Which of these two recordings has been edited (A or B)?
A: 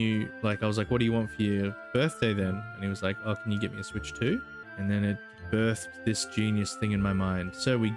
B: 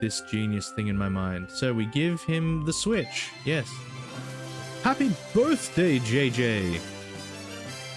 A